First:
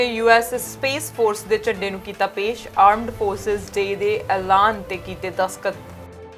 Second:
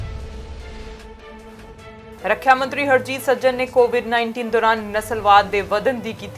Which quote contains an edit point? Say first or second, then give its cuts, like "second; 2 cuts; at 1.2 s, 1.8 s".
second; 2 cuts; at 1.1 s, 1.8 s